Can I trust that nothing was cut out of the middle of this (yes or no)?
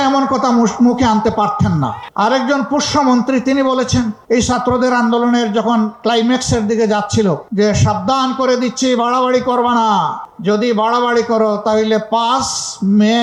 yes